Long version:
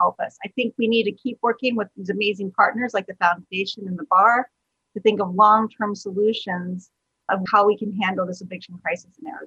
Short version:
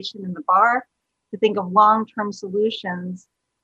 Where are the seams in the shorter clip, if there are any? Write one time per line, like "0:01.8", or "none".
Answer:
none